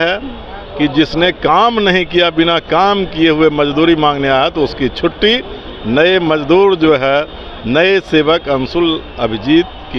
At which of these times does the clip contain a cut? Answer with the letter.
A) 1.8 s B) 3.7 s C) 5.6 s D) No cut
D